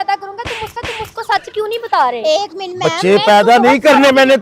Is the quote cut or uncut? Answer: uncut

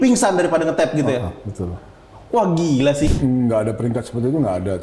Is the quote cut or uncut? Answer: cut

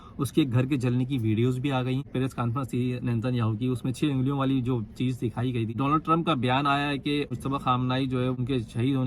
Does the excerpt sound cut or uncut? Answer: cut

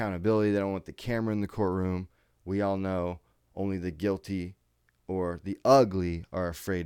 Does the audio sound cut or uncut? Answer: uncut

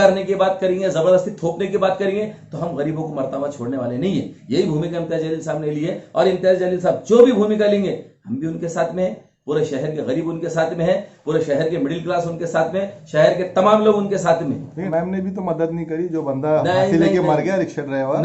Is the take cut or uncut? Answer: cut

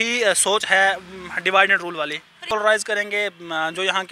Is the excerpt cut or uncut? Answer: cut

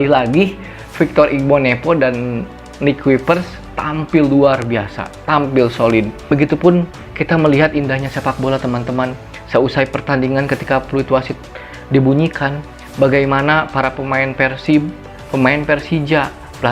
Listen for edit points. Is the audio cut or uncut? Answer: cut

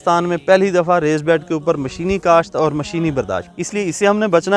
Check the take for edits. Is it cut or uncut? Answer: cut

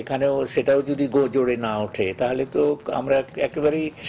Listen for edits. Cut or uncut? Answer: uncut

